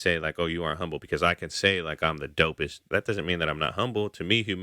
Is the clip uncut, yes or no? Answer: no